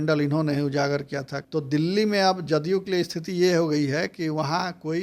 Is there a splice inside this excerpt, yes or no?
yes